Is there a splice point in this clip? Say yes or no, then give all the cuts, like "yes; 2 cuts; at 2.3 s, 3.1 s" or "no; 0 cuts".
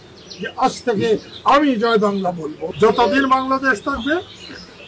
yes; 1 cut; at 2.5 s